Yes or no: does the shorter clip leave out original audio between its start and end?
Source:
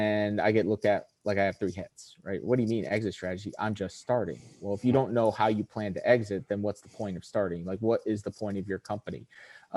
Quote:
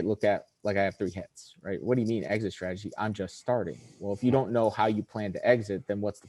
no